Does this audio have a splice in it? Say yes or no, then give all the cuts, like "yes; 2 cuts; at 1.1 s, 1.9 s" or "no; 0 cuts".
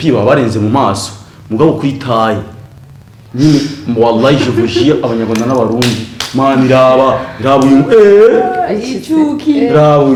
no; 0 cuts